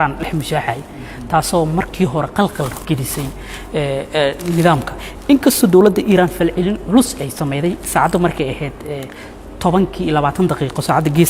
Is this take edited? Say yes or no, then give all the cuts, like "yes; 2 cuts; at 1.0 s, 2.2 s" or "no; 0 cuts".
no; 0 cuts